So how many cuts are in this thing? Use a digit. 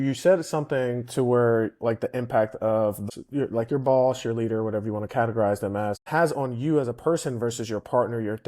2